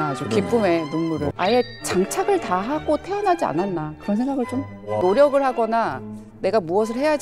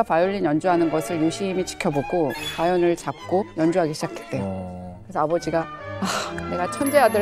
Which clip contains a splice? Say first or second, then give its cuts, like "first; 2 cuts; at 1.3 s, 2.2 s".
first; 2 cuts; at 1.3 s, 5.0 s